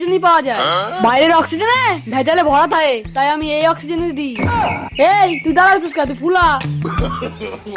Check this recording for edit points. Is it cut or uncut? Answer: uncut